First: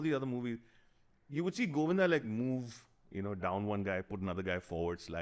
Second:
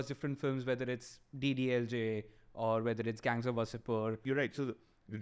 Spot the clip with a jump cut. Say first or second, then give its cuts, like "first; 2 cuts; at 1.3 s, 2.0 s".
second; 1 cut; at 4.2 s